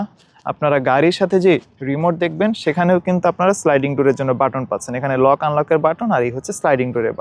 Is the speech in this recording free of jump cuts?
yes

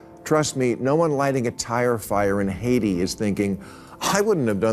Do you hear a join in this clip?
no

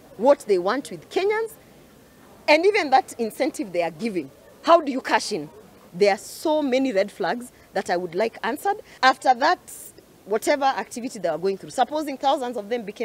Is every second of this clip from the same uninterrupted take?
no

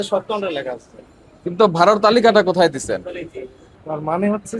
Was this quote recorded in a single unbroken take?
no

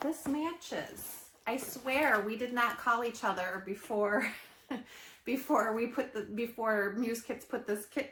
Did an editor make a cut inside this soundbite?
no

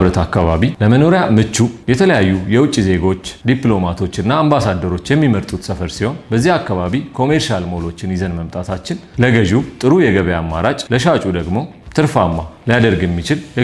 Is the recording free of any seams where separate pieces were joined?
no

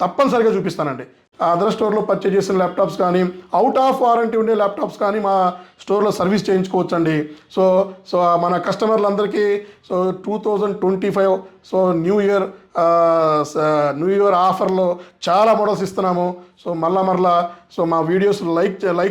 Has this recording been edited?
yes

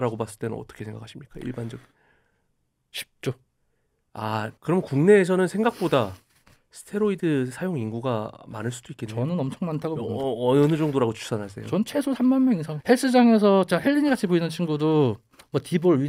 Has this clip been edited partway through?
yes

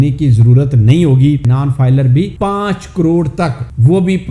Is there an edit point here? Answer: yes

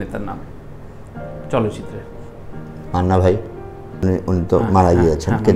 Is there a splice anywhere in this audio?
yes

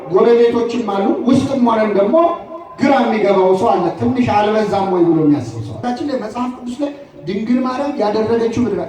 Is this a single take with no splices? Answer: no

